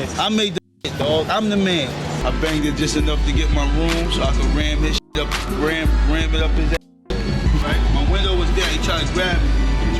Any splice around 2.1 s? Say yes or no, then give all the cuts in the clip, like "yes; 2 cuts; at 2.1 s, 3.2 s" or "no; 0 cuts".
yes; 1 cut; at 2.1 s